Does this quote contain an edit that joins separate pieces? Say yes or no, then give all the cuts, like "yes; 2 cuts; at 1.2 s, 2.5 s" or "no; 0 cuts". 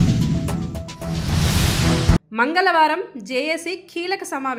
no; 0 cuts